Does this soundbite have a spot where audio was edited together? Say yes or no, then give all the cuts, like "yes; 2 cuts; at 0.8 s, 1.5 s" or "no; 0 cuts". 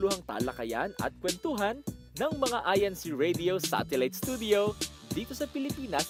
no; 0 cuts